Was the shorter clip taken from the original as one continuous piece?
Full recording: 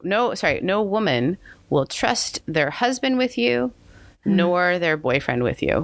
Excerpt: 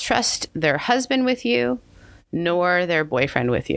yes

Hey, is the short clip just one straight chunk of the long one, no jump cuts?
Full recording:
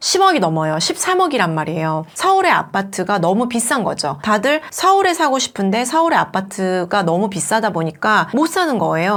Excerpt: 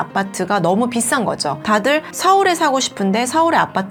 yes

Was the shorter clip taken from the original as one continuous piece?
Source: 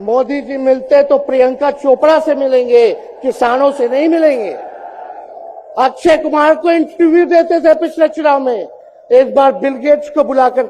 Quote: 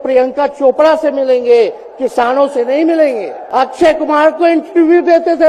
no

